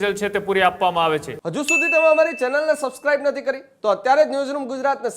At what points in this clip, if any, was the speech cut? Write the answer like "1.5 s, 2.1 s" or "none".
1.4 s